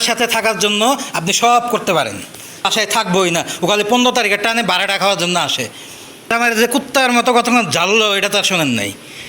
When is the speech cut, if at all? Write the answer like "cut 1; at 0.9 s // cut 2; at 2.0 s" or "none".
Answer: cut 1; at 2.7 s // cut 2; at 6.3 s